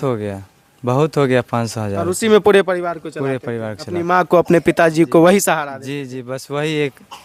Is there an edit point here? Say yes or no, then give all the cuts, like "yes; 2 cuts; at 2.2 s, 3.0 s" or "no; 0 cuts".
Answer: no; 0 cuts